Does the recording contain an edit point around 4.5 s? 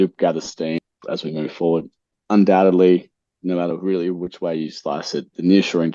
no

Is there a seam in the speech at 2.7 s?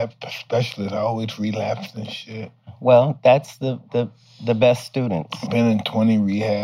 yes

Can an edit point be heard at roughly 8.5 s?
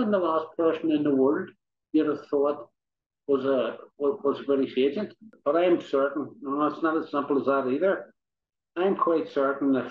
no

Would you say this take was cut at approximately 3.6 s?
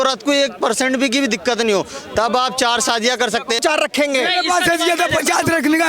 yes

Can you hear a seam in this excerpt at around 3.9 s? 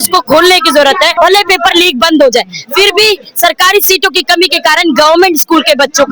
no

